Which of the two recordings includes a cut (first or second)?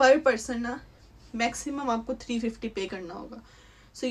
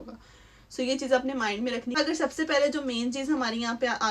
second